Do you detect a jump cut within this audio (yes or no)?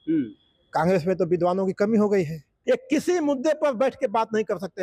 yes